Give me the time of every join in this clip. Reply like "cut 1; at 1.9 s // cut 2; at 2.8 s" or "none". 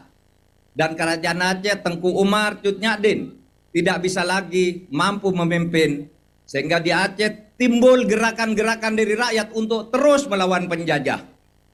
none